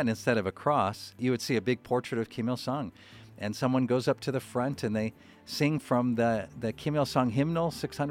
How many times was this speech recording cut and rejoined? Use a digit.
1